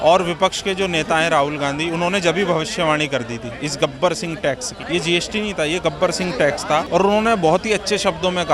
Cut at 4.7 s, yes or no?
yes